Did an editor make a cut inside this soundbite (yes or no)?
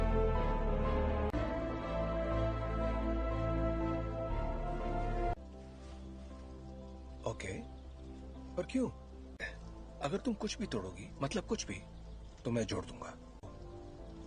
no